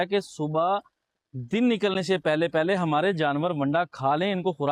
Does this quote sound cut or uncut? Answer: uncut